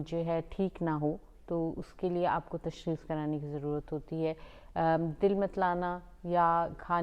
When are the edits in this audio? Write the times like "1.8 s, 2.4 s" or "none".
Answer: none